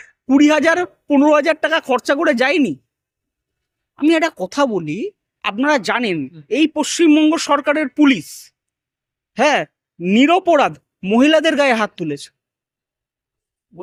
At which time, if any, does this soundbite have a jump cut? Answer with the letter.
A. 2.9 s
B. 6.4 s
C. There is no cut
C